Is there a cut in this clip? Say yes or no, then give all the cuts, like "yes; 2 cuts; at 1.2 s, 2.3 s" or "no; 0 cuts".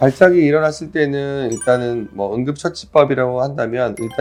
no; 0 cuts